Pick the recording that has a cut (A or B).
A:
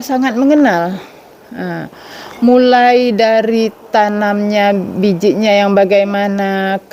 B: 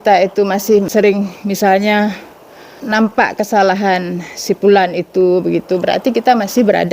B